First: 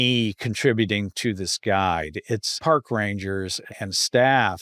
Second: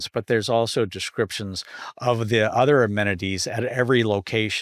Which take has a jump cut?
first; 2 cuts; at 2.5 s, 3.6 s

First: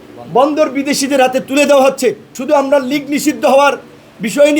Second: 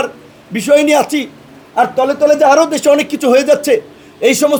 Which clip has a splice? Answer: first; 1 cut; at 2.3 s

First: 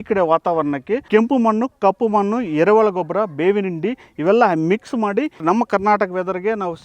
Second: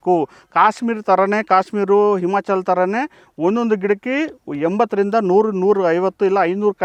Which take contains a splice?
first; 2 cuts; at 1.0 s, 5.4 s

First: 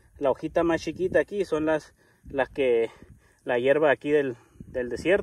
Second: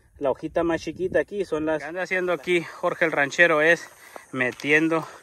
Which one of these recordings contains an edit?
second; 1 cut; at 2.1 s

